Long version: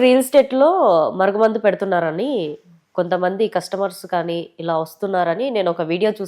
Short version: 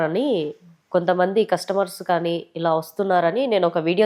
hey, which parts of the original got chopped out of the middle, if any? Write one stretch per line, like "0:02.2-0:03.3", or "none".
none